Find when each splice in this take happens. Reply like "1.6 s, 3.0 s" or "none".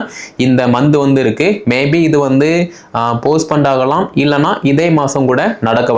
none